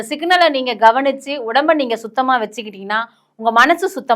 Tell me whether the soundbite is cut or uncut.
uncut